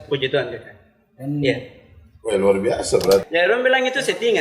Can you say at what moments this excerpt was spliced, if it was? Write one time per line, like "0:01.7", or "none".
0:03.3